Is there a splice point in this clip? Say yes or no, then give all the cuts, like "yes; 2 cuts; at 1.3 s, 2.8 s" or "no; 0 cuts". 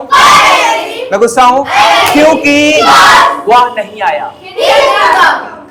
no; 0 cuts